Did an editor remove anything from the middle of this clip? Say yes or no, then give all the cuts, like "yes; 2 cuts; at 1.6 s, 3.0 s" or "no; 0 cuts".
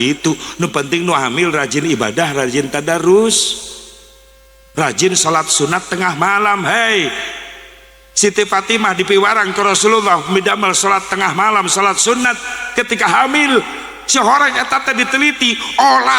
no; 0 cuts